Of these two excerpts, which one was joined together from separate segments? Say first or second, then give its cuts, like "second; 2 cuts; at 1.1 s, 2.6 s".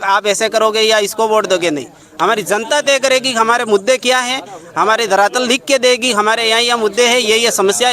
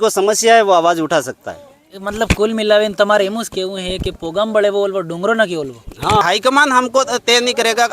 second; 1 cut; at 6.2 s